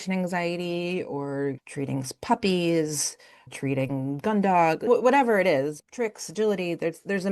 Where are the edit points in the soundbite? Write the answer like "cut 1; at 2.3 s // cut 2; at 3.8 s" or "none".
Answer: cut 1; at 1.6 s // cut 2; at 3.5 s // cut 3; at 4.9 s // cut 4; at 5.8 s